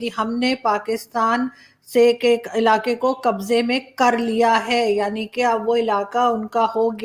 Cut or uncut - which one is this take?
uncut